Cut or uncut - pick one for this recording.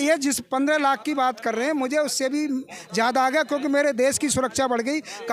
uncut